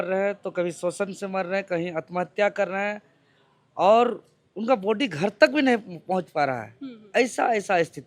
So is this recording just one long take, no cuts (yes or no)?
yes